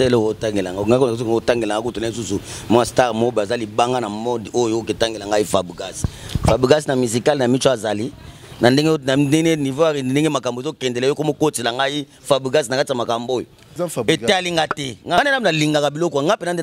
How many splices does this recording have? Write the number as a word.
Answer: two